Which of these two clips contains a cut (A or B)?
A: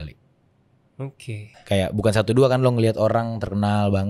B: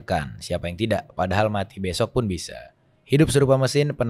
A